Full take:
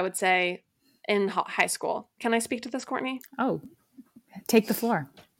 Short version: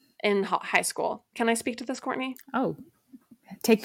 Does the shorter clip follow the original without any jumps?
yes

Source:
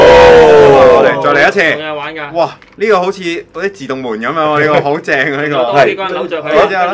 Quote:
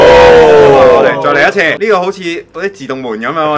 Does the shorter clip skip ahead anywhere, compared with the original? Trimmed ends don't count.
yes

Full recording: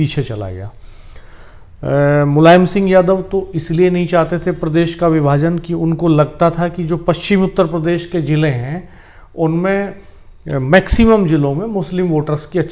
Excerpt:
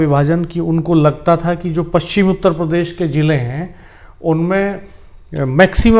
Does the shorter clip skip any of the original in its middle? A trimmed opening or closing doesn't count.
no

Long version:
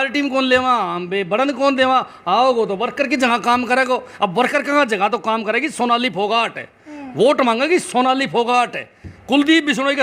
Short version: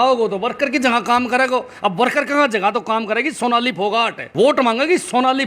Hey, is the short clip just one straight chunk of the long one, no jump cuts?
no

